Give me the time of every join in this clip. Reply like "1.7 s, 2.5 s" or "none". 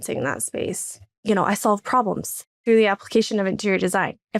1.1 s

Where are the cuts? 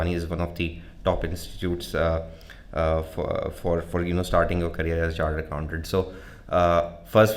none

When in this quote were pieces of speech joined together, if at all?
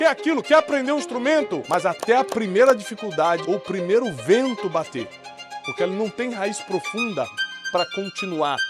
1.6 s, 3.4 s

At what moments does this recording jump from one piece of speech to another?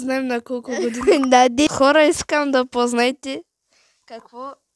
1.7 s

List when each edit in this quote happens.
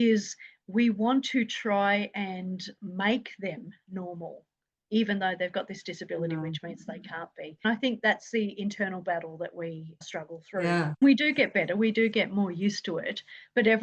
7.6 s, 10.8 s

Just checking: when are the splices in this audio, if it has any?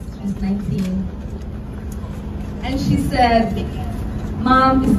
none

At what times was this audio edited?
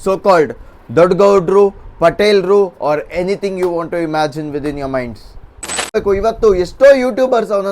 5.9 s

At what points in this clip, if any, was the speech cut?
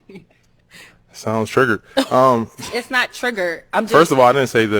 none

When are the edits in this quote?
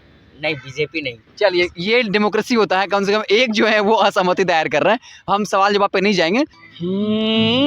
6.6 s

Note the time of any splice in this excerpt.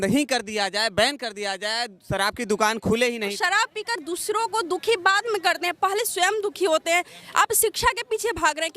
3.3 s, 7.2 s

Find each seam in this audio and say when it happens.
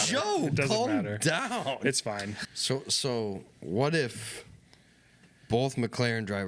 2.4 s

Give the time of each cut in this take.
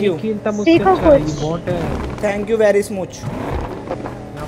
none

